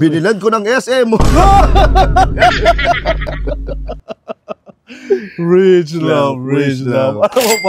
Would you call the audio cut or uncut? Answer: uncut